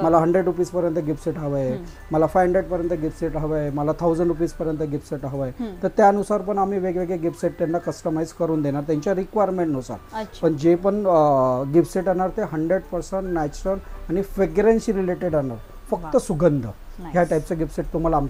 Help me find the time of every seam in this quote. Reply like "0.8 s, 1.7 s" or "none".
none